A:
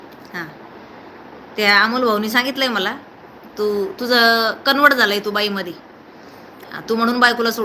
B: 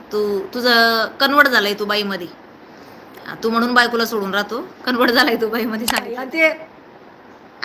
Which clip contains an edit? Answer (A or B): B